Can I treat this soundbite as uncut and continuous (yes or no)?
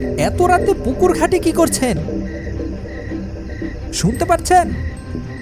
yes